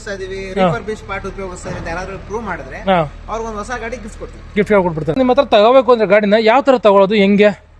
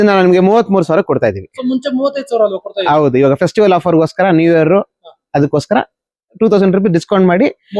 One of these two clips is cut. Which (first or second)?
first